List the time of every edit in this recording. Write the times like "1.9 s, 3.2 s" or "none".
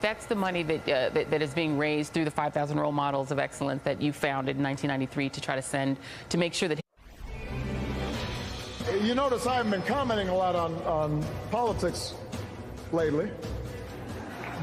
10.8 s